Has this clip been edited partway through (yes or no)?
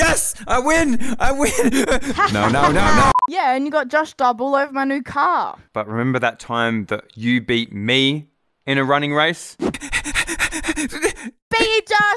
no